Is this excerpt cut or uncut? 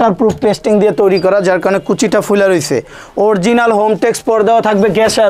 uncut